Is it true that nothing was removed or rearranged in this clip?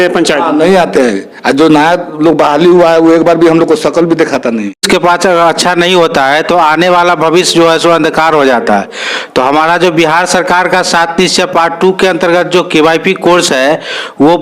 no; 1 cut; at 4.8 s

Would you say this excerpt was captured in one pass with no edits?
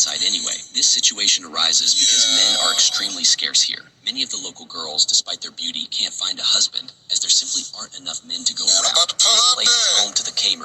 no; 1 cut; at 6.7 s

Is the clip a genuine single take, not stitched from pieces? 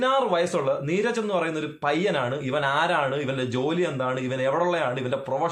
yes; 0 cuts

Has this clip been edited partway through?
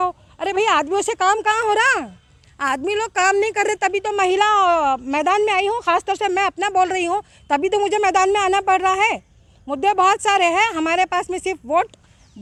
no; 0 cuts

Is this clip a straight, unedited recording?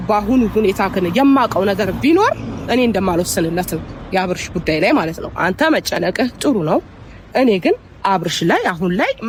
yes; 0 cuts

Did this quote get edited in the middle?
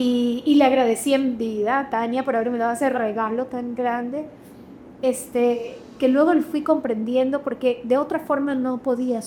no; 0 cuts

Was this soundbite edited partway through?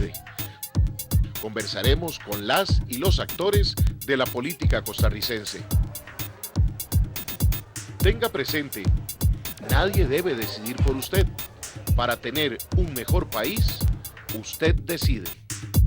yes; 1 cut; at 10.1 s

